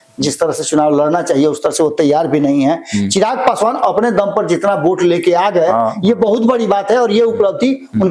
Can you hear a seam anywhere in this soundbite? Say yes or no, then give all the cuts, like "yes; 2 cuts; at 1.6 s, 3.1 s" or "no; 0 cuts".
no; 0 cuts